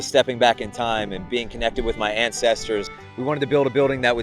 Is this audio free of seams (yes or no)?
no